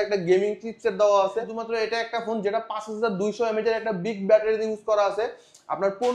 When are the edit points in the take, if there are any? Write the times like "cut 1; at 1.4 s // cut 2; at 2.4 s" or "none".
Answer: cut 1; at 1.6 s

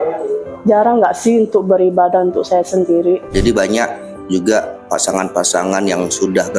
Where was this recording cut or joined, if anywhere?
cut 1; at 3.3 s

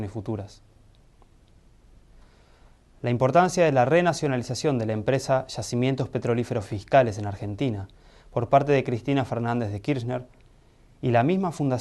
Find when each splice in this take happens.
cut 1; at 1.5 s

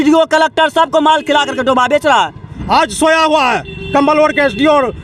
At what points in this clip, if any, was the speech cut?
cut 1; at 2.5 s

